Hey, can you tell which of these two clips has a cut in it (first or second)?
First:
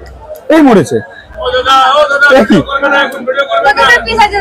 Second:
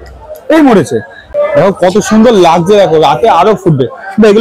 second